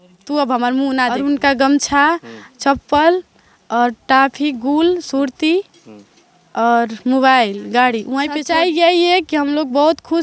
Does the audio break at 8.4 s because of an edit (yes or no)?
yes